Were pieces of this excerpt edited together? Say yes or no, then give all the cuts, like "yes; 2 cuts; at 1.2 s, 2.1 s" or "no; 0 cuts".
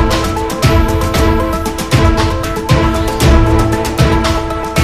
no; 0 cuts